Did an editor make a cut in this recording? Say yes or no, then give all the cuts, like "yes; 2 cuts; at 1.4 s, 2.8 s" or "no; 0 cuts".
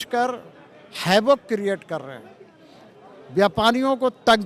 no; 0 cuts